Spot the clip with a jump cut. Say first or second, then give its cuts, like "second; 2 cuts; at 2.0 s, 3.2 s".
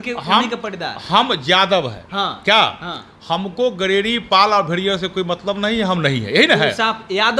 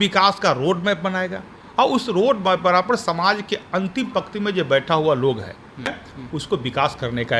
second; 1 cut; at 6.1 s